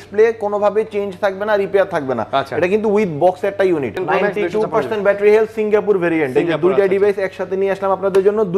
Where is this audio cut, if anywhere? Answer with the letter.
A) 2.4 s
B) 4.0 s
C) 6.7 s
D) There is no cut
B